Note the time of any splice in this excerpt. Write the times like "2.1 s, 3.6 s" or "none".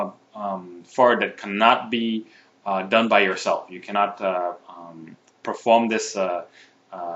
3.2 s